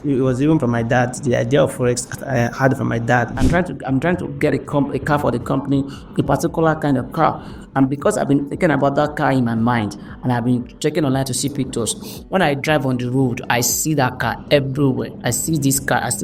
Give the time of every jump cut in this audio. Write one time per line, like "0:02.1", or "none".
0:03.3